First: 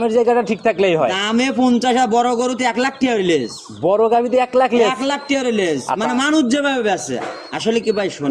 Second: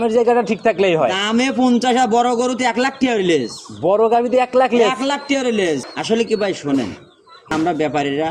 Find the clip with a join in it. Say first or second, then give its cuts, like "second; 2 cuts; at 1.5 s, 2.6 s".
second; 2 cuts; at 5.8 s, 7.5 s